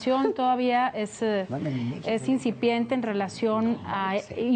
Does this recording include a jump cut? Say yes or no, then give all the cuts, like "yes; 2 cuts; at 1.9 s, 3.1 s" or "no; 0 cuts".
no; 0 cuts